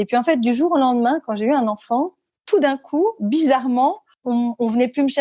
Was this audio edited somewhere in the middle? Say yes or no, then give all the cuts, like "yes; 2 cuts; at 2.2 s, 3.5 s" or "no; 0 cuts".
yes; 1 cut; at 4.1 s